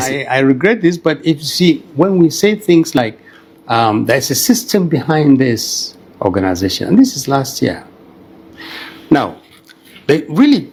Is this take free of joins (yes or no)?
yes